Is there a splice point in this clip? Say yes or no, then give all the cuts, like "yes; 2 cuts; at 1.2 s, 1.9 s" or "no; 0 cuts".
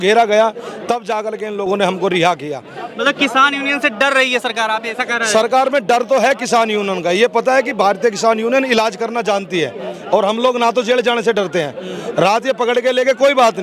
no; 0 cuts